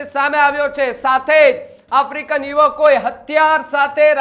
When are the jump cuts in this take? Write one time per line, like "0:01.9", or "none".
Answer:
none